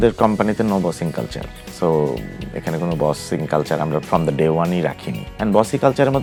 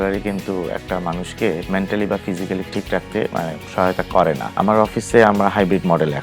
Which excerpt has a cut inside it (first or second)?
second